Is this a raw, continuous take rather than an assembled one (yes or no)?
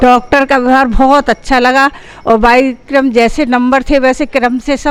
yes